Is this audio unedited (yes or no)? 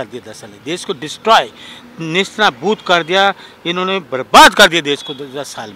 yes